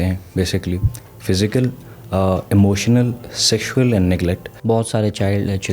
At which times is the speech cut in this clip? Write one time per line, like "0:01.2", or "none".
0:04.5